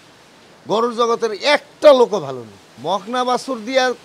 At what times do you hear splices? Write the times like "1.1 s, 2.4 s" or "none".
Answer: 2.7 s